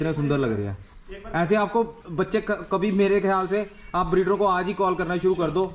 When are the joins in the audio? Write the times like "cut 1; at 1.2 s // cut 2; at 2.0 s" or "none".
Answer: none